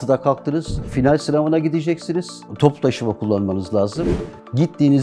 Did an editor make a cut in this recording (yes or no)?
yes